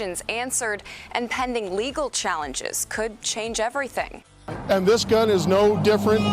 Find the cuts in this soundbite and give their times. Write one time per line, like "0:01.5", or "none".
0:04.2